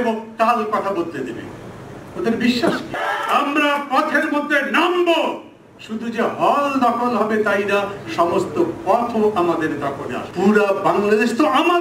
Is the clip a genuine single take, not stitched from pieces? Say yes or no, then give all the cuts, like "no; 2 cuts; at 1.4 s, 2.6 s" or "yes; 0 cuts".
no; 2 cuts; at 3.0 s, 10.2 s